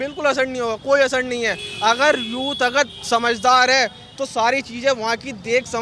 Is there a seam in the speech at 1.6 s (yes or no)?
no